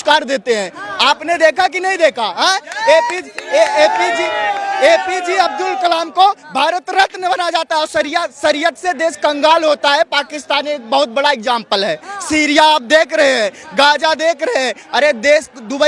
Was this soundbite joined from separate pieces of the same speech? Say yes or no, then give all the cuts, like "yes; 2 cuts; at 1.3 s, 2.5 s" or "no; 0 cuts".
no; 0 cuts